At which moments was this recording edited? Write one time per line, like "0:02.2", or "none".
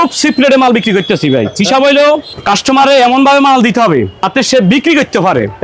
0:02.3
0:04.2